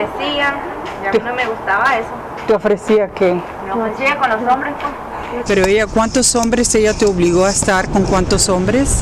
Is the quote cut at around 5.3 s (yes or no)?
yes